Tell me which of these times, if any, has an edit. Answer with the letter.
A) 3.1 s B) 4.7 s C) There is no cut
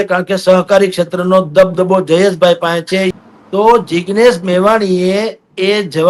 A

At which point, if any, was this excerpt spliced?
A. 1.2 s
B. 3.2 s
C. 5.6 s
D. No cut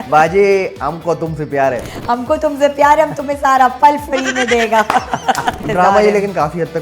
C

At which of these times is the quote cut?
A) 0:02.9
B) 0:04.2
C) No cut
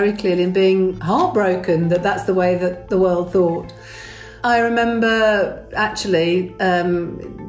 B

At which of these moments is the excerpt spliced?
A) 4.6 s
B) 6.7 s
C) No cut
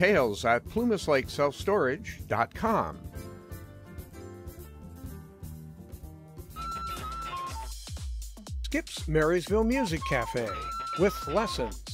B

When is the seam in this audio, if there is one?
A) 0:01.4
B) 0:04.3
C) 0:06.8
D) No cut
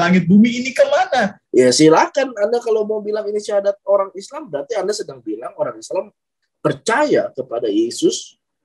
A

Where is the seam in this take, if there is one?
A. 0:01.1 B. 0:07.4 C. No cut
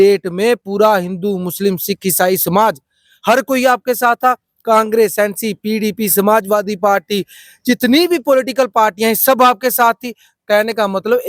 C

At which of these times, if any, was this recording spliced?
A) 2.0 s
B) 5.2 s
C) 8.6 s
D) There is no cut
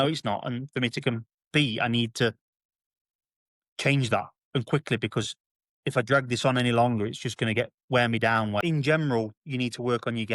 C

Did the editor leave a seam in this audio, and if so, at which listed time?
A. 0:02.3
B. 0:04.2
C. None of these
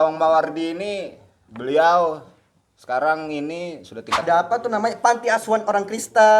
B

